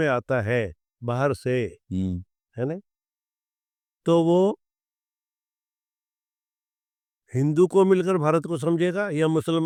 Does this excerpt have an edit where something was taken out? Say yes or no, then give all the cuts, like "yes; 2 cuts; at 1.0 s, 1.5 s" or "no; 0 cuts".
no; 0 cuts